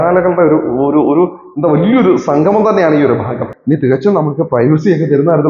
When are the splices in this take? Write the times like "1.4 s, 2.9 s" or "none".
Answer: 3.5 s